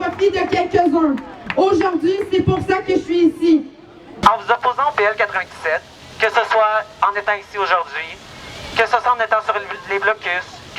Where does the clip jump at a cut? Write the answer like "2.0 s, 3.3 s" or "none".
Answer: 4.2 s